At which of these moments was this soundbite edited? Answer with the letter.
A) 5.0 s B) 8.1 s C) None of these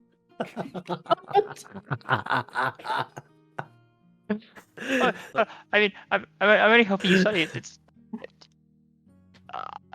A